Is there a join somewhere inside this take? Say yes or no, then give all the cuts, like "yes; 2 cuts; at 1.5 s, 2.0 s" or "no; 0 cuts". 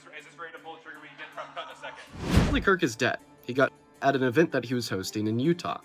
yes; 1 cut; at 2.3 s